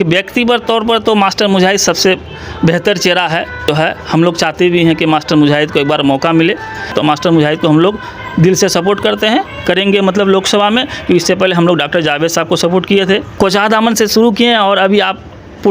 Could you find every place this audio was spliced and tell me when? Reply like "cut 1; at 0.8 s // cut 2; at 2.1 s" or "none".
cut 1; at 3.7 s // cut 2; at 6.9 s // cut 3; at 13.3 s